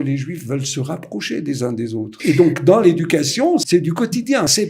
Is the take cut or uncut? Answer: cut